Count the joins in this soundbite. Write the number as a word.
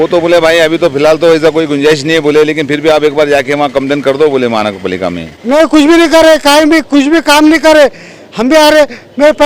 one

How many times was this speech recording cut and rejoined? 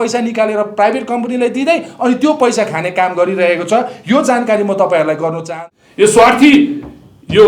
one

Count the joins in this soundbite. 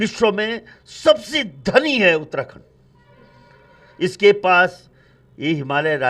zero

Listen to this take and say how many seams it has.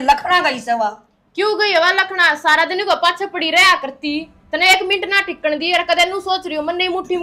zero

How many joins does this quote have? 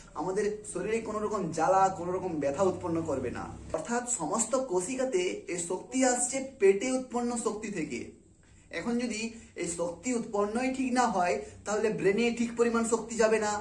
one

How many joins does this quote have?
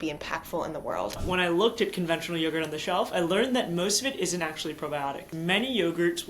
two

